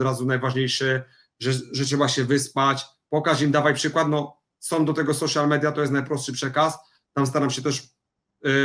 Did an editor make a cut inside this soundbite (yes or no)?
no